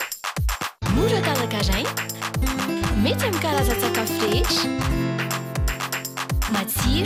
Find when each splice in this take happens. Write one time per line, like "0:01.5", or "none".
none